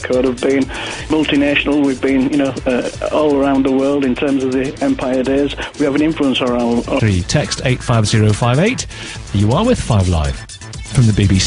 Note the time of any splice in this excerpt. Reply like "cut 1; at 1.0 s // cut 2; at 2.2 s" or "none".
none

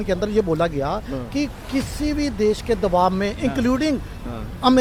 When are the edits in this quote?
none

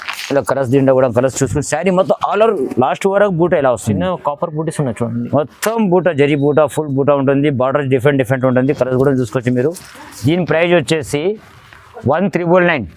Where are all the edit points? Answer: none

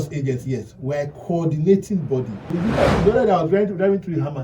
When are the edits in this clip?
cut 1; at 2.9 s

